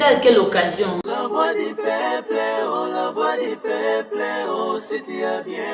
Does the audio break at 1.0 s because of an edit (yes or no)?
yes